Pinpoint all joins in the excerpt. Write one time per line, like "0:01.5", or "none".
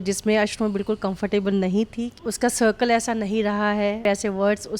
0:02.1
0:04.0